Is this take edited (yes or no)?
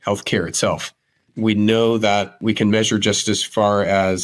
yes